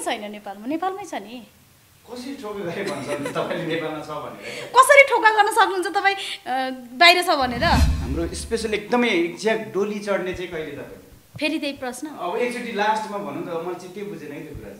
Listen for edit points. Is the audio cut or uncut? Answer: cut